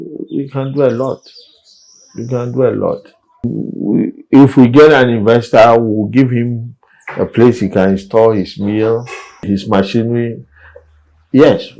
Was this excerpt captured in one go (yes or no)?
no